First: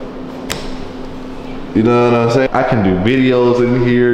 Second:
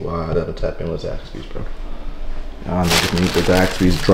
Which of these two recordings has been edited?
first; 1 cut; at 2.5 s

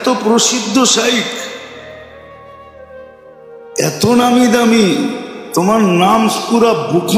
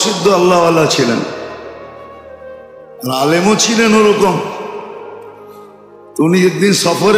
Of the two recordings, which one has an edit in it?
first; 2 cuts; at 1.7 s, 3.8 s

